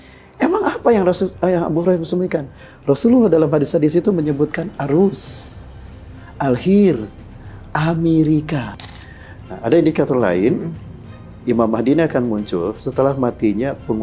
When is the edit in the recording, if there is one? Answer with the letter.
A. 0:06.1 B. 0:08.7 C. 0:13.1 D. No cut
B